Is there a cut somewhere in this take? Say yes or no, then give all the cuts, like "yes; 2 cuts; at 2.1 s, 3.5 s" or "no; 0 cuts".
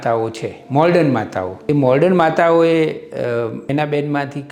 no; 0 cuts